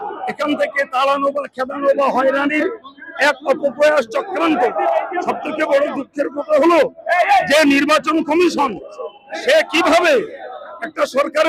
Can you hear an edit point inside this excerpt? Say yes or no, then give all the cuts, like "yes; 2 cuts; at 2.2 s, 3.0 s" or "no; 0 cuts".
no; 0 cuts